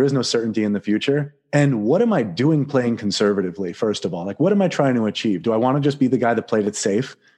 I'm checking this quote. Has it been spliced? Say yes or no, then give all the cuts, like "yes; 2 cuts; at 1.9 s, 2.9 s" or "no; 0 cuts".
yes; 1 cut; at 1.4 s